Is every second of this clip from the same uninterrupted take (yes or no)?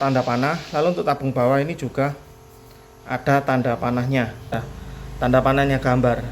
no